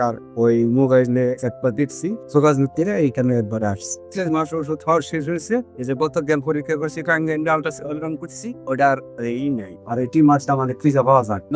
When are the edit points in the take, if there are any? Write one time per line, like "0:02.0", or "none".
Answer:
0:02.2
0:04.0